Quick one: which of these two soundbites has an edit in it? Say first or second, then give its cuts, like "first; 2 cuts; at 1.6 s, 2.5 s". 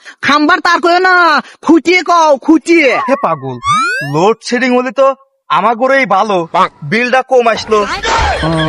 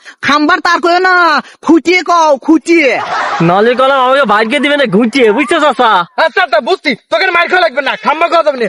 first; 1 cut; at 3.0 s